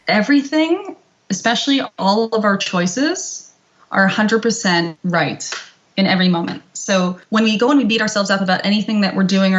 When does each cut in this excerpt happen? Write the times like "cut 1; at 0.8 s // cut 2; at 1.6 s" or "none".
cut 1; at 4.9 s // cut 2; at 7.2 s